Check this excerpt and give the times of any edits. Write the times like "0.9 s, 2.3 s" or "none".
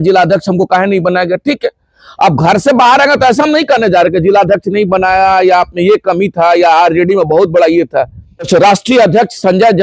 8.5 s